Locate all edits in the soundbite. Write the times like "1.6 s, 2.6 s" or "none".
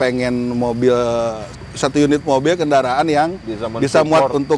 1.5 s